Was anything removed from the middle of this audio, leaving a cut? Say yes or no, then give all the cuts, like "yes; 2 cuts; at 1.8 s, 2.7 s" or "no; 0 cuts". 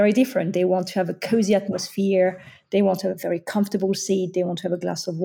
no; 0 cuts